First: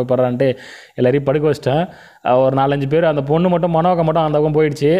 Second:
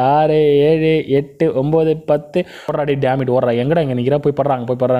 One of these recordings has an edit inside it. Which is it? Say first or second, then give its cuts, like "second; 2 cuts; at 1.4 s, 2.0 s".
second; 1 cut; at 2.7 s